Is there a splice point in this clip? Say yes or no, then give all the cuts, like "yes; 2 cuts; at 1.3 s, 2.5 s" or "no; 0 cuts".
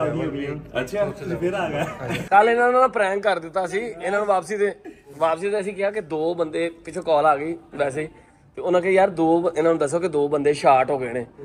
no; 0 cuts